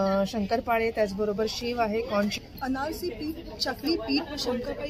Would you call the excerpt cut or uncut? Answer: cut